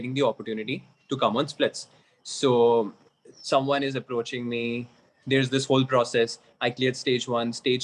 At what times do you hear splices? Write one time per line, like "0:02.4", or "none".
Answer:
none